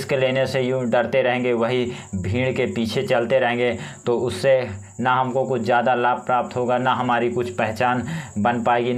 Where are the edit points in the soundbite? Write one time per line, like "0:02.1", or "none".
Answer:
none